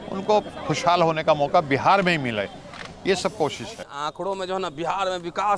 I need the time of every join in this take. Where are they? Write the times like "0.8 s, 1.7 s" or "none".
3.8 s